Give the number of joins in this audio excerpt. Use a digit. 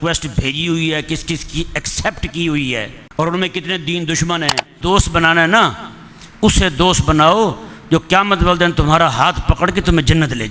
2